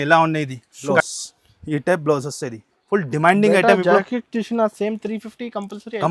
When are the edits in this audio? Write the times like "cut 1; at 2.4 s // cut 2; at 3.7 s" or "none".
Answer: cut 1; at 1.0 s